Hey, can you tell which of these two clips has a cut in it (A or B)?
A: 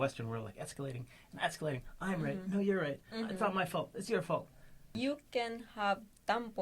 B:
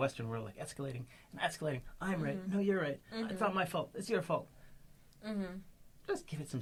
A